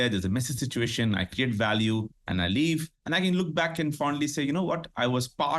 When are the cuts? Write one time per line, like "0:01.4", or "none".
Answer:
0:02.9